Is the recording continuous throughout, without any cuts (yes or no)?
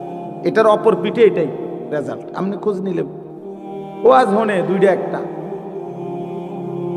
yes